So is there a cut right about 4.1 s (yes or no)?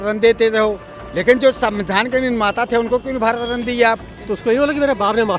yes